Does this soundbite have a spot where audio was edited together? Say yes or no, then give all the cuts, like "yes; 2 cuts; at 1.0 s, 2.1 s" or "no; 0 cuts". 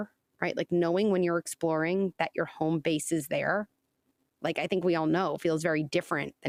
no; 0 cuts